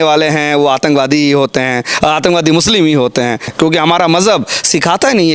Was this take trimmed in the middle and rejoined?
yes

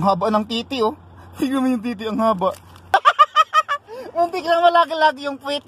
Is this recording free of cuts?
no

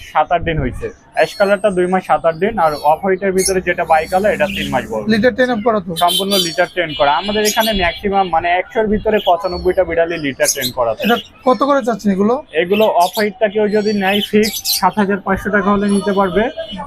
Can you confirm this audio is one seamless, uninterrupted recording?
yes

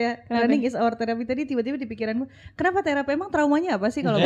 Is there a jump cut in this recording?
no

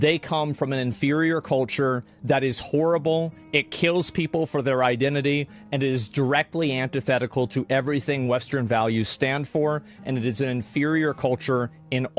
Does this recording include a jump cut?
no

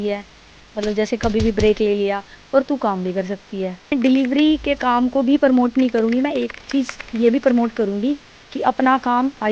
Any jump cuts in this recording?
yes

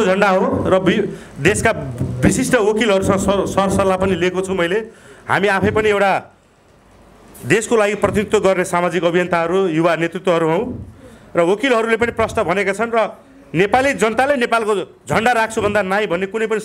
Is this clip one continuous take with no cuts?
yes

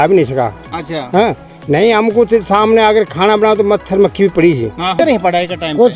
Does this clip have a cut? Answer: yes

